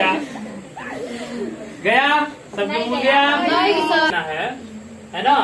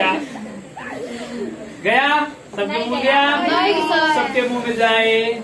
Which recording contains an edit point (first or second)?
first